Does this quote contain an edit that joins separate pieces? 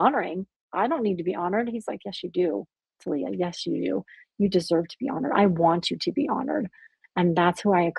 no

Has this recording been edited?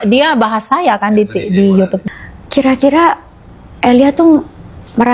yes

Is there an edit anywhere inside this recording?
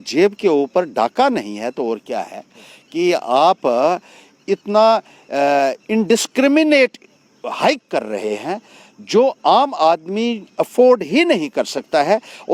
no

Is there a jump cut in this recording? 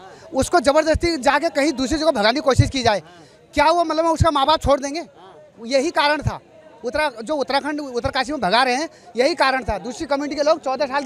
no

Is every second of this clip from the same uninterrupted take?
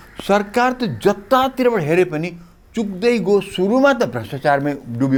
yes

